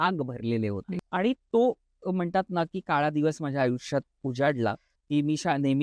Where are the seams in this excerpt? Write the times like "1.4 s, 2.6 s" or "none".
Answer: 0.9 s, 4.9 s